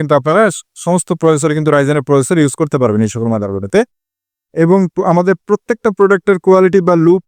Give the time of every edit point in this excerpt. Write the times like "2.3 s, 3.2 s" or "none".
4.4 s